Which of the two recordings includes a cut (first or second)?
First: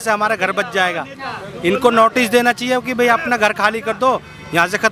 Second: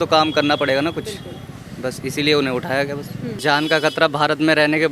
second